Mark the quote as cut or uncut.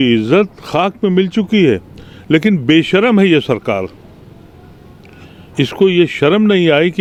uncut